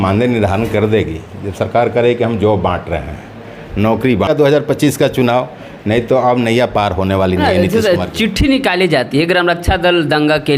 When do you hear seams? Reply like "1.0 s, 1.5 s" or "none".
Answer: 4.3 s